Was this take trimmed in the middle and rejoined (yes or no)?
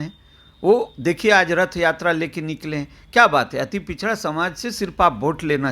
no